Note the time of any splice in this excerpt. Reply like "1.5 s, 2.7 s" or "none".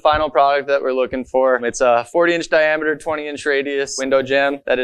none